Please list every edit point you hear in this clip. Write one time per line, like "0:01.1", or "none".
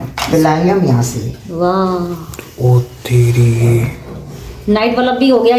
none